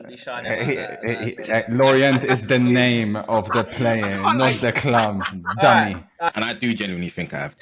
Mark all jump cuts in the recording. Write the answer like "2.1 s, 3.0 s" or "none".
6.3 s